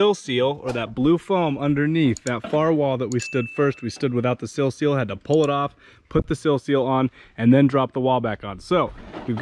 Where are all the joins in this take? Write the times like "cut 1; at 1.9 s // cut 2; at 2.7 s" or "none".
none